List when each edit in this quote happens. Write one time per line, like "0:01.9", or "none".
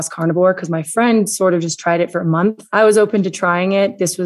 0:02.6